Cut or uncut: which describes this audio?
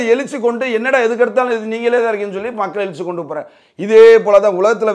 uncut